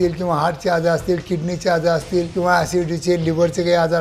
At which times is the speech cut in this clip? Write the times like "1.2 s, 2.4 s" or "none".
none